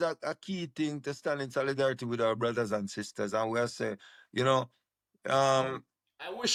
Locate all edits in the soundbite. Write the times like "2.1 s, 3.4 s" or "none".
none